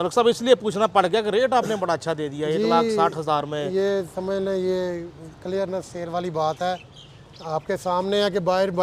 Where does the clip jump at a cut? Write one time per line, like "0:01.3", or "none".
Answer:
none